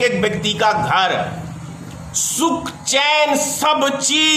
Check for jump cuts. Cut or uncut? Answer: uncut